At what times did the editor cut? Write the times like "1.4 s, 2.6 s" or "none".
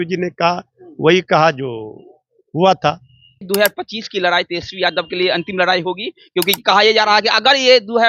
3.4 s